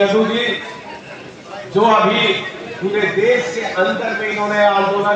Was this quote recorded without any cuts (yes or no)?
yes